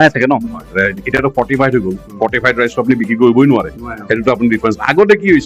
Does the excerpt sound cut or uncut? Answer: uncut